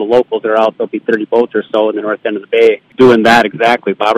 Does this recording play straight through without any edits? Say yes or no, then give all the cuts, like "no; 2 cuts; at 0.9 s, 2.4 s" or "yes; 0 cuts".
no; 1 cut; at 2.9 s